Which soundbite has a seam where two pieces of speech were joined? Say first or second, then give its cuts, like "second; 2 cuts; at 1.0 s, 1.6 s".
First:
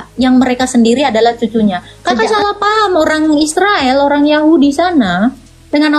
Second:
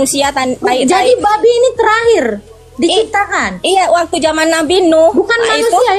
first; 1 cut; at 1.9 s